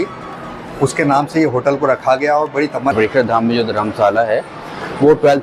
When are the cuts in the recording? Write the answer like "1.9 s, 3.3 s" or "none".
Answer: 2.9 s